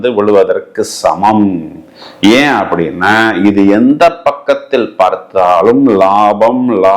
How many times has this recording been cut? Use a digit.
0